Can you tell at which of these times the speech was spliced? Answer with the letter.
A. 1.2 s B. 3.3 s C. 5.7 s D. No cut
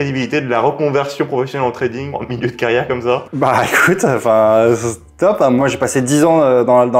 B